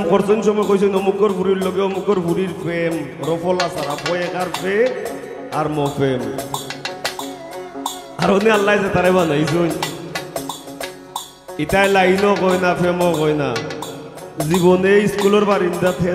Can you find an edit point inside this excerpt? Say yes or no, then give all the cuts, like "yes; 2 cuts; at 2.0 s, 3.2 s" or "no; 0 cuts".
no; 0 cuts